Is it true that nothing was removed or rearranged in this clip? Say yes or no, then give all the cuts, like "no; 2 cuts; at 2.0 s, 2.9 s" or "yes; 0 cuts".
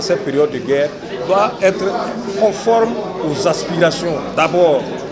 yes; 0 cuts